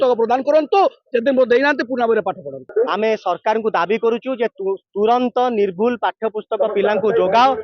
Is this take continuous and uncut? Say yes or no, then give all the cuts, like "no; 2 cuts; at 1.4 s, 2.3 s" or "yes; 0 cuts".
no; 1 cut; at 2.7 s